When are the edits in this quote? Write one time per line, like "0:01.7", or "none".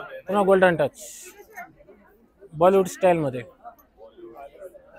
none